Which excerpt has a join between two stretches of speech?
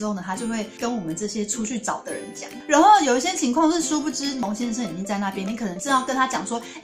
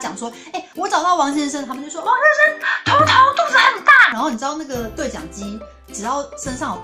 first; 1 cut; at 4.4 s

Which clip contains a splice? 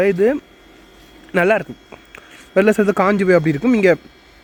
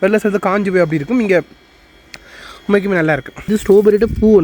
second; 1 cut; at 3.5 s

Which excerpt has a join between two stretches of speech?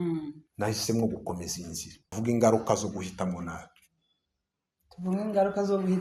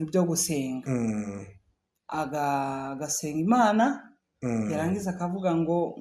first; 1 cut; at 2.1 s

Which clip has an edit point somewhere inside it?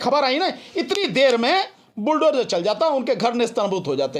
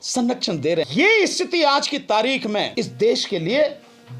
second; 2 cuts; at 0.9 s, 2.7 s

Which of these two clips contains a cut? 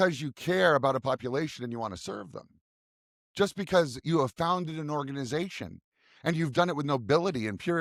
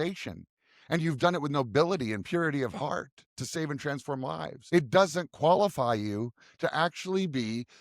second; 1 cut; at 4.6 s

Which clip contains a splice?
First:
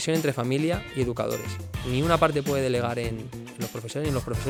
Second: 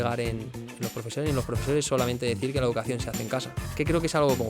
second; 1 cut; at 3.6 s

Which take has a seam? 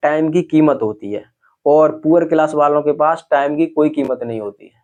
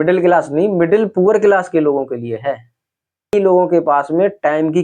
second; 1 cut; at 3.3 s

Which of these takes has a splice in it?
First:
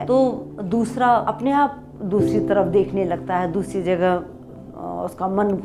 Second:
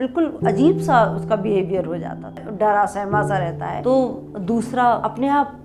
second; 1 cut; at 2.4 s

